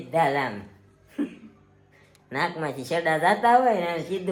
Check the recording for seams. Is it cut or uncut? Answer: uncut